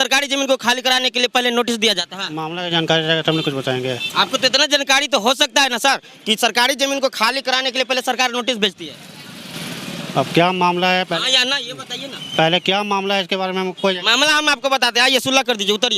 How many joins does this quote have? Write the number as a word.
zero